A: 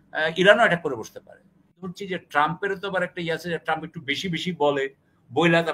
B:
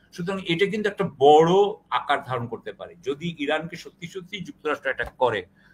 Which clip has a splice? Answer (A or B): A